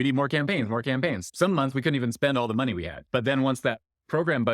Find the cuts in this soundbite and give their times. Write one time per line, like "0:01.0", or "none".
0:01.2
0:03.0